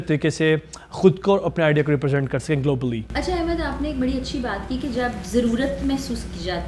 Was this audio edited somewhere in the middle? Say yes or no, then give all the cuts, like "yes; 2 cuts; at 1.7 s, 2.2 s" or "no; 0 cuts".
no; 0 cuts